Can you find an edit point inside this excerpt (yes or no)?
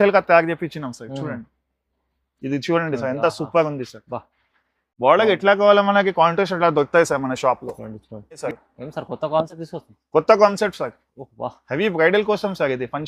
yes